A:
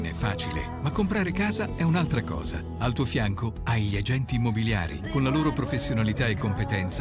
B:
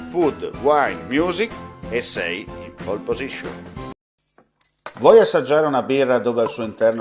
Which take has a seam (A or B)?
B